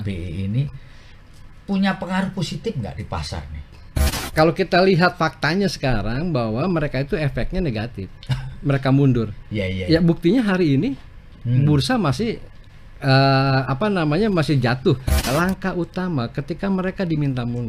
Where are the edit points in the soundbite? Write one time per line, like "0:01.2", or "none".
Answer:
0:04.2
0:15.3